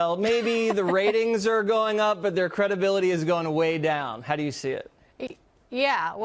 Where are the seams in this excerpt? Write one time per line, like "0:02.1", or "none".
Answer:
none